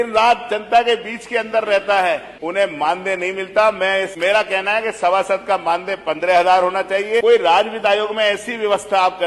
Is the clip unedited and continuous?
no; 3 cuts; at 2.3 s, 4.1 s, 7.2 s

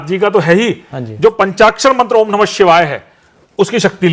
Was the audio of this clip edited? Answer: no; 0 cuts

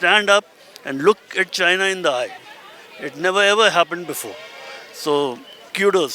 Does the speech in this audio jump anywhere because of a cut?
no; 0 cuts

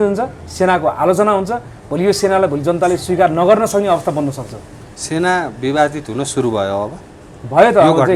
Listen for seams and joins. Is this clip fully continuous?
yes; 0 cuts

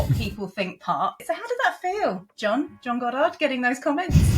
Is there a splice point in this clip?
yes; 1 cut; at 1.2 s

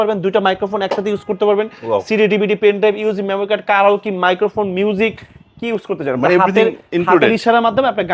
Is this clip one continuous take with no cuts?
yes; 0 cuts

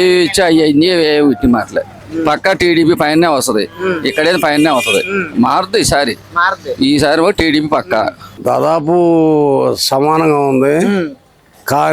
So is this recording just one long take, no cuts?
no; 1 cut; at 8.3 s

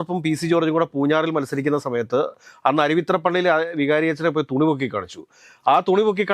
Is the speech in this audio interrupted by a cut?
no; 0 cuts

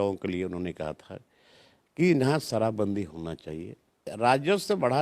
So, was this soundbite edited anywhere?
yes; 1 cut; at 4.1 s

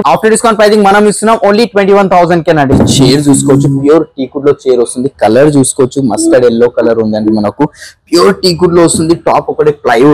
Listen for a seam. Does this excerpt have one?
yes; 1 cut; at 2.7 s

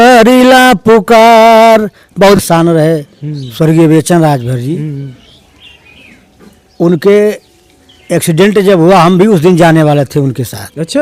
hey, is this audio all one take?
no; 1 cut; at 2.4 s

